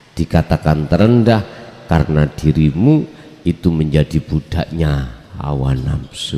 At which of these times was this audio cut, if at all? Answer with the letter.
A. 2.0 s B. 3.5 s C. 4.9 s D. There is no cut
D